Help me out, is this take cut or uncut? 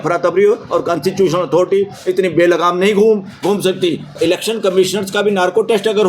cut